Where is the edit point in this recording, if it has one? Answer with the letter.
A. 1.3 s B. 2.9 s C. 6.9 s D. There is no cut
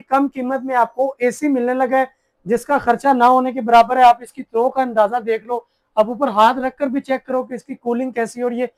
D